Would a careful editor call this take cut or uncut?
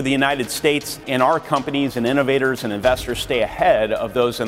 cut